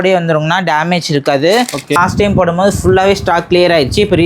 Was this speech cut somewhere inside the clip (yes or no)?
yes